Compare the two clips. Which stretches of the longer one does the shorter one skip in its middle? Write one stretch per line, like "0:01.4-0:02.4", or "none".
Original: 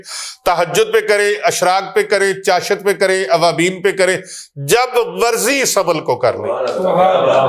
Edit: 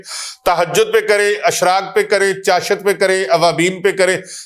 none